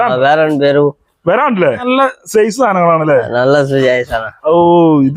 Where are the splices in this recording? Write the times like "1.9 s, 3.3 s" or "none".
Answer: 1.9 s